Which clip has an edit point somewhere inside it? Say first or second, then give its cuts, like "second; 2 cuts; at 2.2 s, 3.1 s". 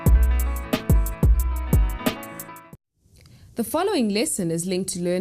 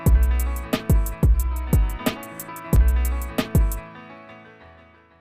second; 1 cut; at 2.4 s